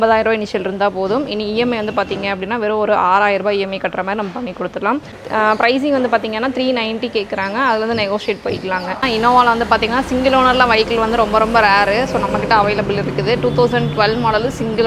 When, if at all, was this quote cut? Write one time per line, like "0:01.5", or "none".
0:05.2
0:09.1